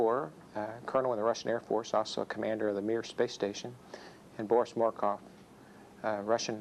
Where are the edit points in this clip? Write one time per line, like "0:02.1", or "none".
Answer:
none